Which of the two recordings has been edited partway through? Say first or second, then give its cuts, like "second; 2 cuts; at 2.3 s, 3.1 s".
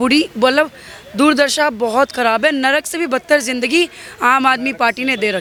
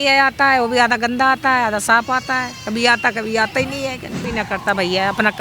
second; 1 cut; at 4.1 s